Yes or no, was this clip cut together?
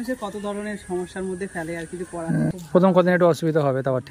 yes